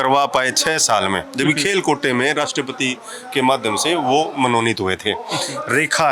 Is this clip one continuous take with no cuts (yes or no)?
yes